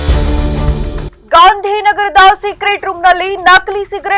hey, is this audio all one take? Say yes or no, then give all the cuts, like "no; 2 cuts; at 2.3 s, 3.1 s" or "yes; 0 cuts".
no; 1 cut; at 1.1 s